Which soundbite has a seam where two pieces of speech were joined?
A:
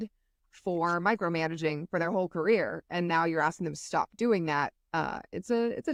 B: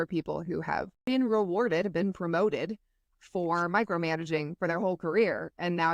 B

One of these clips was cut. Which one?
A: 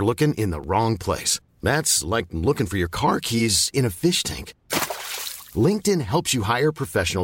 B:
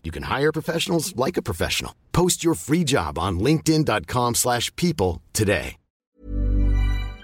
B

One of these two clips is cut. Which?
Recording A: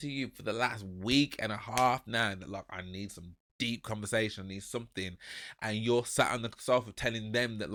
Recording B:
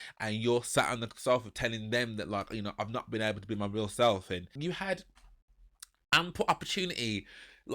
B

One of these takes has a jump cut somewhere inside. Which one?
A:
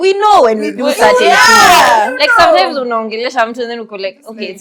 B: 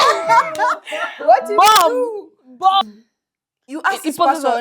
B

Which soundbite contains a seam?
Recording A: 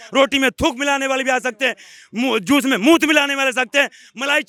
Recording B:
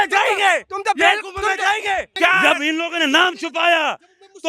B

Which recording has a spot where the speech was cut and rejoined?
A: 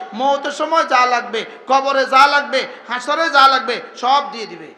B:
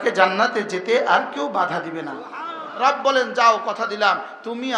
B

